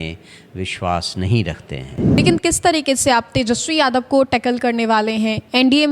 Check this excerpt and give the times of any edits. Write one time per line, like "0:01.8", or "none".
0:02.2